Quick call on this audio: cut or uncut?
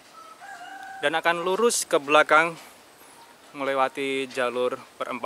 uncut